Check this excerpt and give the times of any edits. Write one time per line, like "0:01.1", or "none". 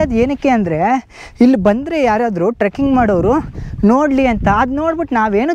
none